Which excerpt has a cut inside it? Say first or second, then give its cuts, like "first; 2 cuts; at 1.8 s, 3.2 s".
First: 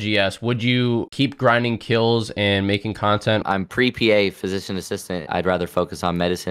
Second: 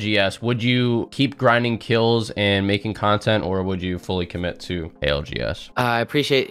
first; 2 cuts; at 3.4 s, 5.2 s